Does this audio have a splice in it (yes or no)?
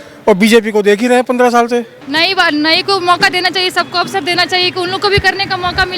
yes